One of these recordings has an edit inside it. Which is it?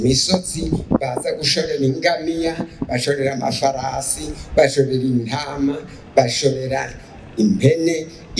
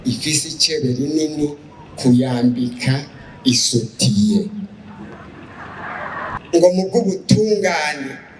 second; 1 cut; at 6.4 s

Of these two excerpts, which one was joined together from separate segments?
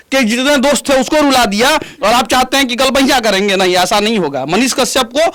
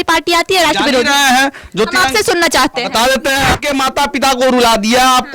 second; 1 cut; at 3.5 s

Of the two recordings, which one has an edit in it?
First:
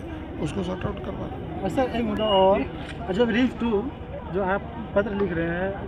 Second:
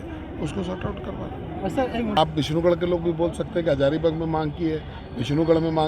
second; 1 cut; at 2.2 s

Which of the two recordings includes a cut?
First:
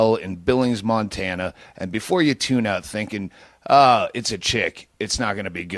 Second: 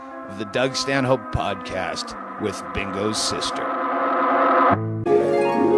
second; 1 cut; at 2.5 s

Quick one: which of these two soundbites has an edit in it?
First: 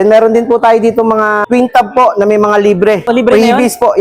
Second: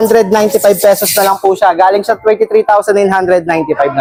first; 2 cuts; at 1.4 s, 3.1 s

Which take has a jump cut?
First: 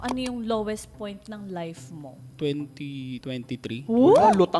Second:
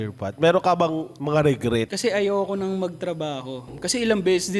second; 2 cuts; at 1.9 s, 3.7 s

